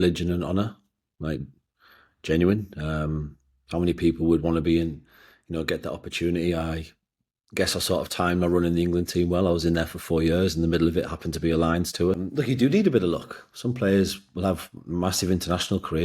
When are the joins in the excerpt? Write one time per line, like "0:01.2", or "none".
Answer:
0:12.2